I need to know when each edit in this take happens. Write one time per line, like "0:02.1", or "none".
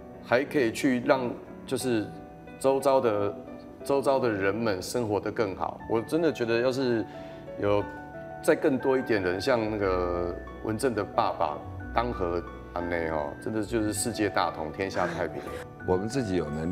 0:15.6